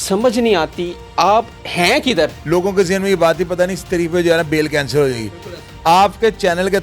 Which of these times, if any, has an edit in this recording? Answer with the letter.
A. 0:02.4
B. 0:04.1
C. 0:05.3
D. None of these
A